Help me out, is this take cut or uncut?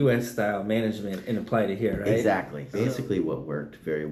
cut